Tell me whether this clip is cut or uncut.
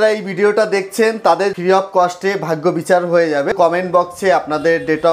cut